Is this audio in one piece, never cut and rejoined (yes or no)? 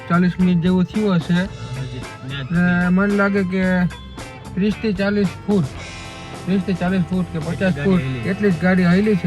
yes